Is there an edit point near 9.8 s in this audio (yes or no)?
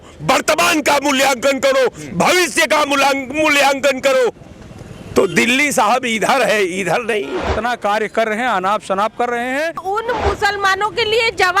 yes